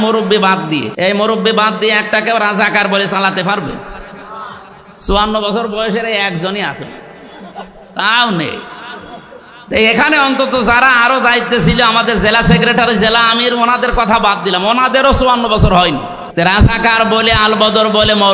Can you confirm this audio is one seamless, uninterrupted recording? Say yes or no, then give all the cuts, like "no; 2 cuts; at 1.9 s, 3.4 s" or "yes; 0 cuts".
no; 2 cuts; at 0.9 s, 16.2 s